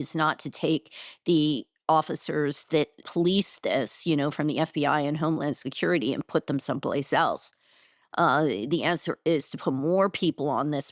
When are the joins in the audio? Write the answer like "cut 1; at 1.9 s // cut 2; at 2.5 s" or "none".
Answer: cut 1; at 3.1 s